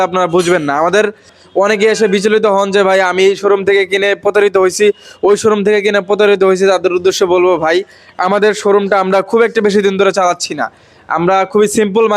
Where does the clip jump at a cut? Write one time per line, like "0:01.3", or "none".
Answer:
0:01.3